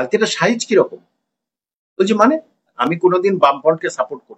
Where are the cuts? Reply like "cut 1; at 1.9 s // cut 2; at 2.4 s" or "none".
cut 1; at 2.7 s